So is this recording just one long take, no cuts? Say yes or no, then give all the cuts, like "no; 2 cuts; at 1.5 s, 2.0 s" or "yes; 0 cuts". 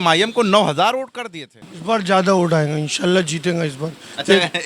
no; 1 cut; at 1.7 s